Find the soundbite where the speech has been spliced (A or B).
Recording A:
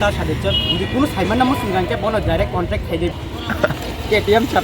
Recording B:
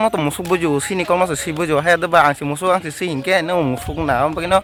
A